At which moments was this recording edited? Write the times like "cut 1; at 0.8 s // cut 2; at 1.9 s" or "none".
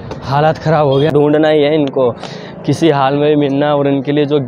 cut 1; at 1.1 s